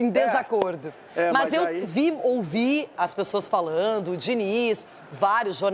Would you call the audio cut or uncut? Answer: uncut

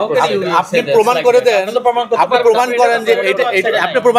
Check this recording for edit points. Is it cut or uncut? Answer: uncut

